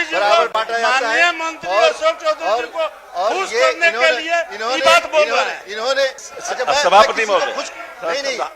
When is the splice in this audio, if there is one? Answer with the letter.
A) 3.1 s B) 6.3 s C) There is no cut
B